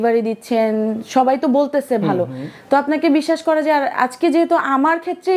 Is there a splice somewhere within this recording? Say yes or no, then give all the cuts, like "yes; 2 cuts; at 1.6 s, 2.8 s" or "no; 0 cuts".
no; 0 cuts